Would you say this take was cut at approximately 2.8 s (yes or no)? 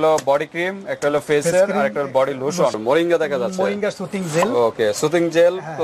yes